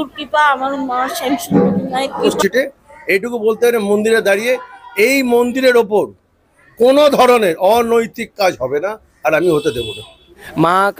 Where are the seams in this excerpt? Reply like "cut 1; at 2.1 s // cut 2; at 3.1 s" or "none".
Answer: cut 1; at 2.3 s // cut 2; at 9.9 s